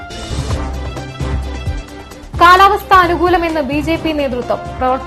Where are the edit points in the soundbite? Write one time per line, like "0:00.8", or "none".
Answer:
none